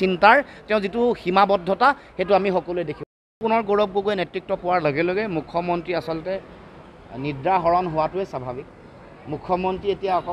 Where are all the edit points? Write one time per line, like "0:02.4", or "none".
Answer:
0:03.4